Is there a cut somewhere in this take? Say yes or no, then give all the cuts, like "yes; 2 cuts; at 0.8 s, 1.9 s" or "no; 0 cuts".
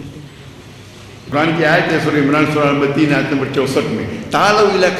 yes; 1 cut; at 1.3 s